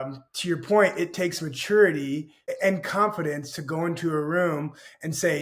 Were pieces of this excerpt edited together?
yes; 1 cut; at 2.5 s

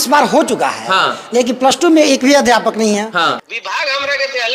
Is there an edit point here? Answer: yes; 1 cut; at 3.3 s

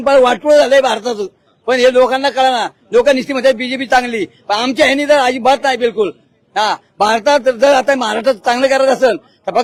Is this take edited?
no; 0 cuts

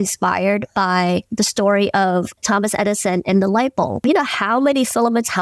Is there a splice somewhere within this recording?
yes; 3 cuts; at 1.3 s, 2.4 s, 4.0 s

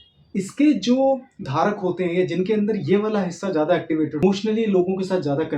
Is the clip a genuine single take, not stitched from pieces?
no; 1 cut; at 4.2 s

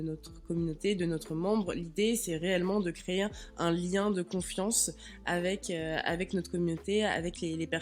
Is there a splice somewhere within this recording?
no; 0 cuts

